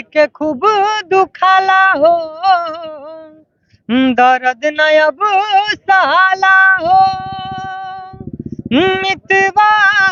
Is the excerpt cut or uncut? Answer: uncut